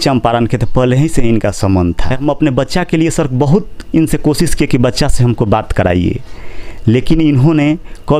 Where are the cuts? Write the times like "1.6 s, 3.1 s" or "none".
2.2 s